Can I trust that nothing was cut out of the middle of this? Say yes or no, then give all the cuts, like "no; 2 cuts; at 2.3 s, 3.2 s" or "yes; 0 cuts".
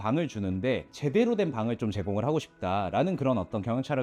yes; 0 cuts